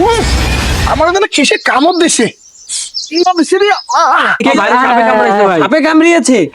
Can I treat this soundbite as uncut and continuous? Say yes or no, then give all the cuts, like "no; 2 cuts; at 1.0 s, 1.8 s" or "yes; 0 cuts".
no; 1 cut; at 4.4 s